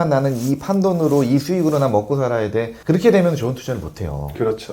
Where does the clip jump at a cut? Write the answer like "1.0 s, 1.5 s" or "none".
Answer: 2.7 s

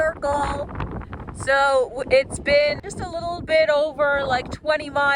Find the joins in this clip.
2.8 s

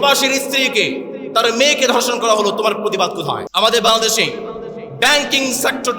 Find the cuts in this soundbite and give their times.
3.5 s

